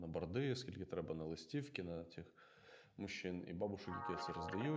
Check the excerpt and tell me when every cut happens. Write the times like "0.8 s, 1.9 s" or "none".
none